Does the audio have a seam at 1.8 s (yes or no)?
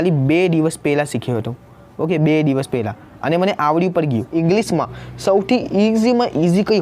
no